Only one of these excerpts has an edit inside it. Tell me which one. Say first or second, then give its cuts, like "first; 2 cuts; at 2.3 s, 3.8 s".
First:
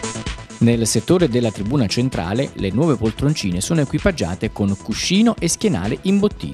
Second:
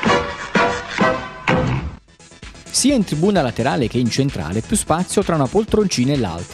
second; 1 cut; at 2.7 s